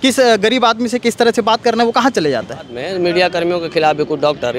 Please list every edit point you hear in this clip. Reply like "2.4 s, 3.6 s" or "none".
2.8 s